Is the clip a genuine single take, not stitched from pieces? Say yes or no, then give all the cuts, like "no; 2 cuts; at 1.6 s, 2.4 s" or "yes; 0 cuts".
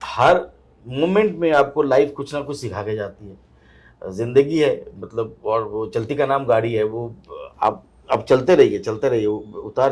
yes; 0 cuts